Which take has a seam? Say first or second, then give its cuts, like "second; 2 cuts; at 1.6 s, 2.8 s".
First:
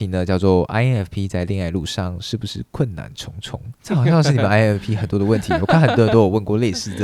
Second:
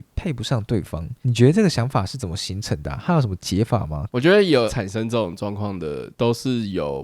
second; 2 cuts; at 4.0 s, 4.8 s